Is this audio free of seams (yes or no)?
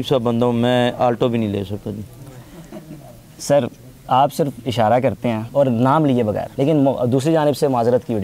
yes